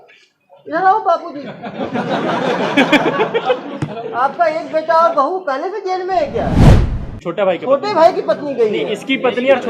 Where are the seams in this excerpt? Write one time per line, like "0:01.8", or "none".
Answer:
0:06.8